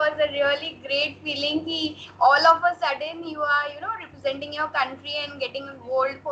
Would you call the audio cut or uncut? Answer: uncut